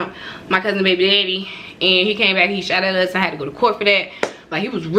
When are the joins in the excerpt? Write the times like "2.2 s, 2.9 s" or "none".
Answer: none